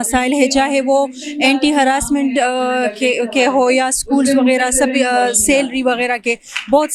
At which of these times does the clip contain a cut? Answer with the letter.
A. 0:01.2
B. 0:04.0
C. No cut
C